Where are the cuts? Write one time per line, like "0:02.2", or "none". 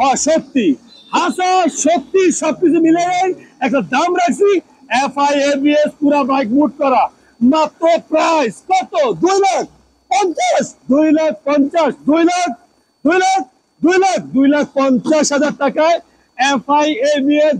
none